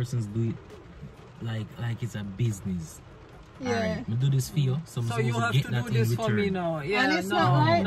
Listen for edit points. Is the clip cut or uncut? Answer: uncut